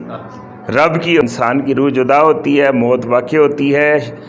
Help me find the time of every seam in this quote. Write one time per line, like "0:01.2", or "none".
0:01.2